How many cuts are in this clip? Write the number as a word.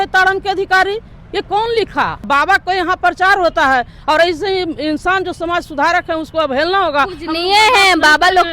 one